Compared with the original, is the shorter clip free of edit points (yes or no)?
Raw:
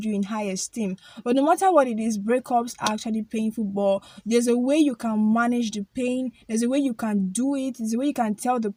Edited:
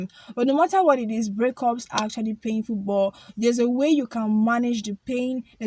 yes